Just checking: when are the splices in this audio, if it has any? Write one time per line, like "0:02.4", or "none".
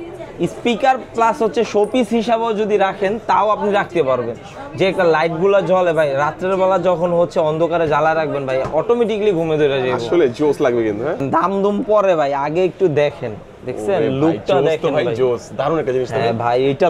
0:11.2